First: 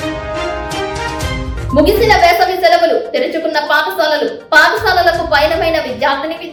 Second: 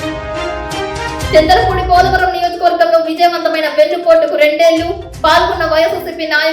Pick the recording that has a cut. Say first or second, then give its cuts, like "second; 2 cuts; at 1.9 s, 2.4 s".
second; 1 cut; at 1.3 s